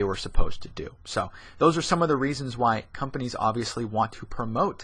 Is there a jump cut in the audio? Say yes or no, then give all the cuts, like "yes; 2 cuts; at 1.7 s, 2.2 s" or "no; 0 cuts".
no; 0 cuts